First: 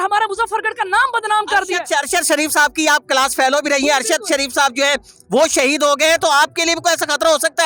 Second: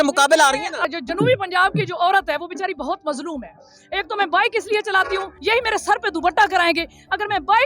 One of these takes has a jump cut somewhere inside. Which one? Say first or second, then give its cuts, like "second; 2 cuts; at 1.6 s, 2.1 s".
second; 2 cuts; at 0.9 s, 5.3 s